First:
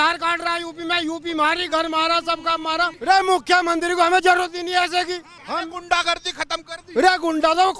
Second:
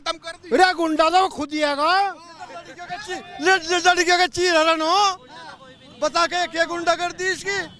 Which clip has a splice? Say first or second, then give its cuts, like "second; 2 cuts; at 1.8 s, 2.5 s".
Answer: first; 2 cuts; at 2.9 s, 5.3 s